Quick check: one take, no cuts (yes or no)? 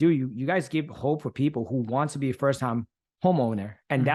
yes